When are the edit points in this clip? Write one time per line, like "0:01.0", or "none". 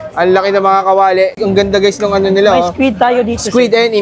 0:01.3